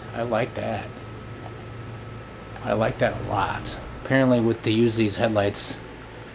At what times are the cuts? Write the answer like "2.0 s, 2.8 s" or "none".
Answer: 4.0 s